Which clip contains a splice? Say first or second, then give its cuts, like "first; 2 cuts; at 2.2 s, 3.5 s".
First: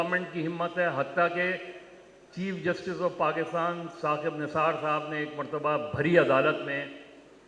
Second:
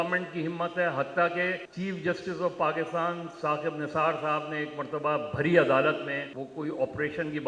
second; 2 cuts; at 1.7 s, 6.3 s